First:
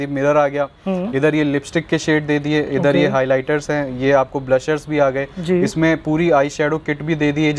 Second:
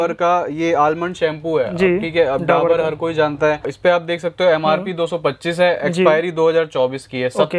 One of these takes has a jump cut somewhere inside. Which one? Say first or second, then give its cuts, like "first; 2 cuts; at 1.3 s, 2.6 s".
second; 1 cut; at 3.7 s